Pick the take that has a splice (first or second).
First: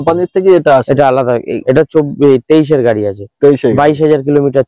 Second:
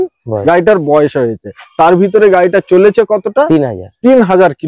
first